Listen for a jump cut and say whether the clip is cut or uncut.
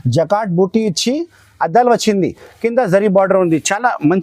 uncut